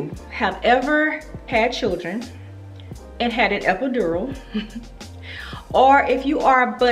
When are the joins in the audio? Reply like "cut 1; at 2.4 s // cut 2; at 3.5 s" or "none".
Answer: none